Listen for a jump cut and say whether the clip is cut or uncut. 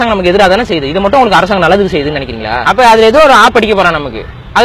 cut